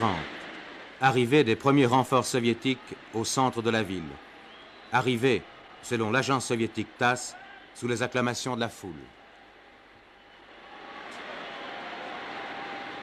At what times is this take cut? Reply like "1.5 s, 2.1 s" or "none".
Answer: none